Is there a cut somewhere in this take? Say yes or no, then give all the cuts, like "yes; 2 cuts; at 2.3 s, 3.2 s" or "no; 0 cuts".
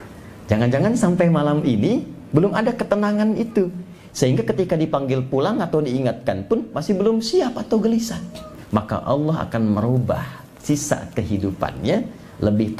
yes; 1 cut; at 8.5 s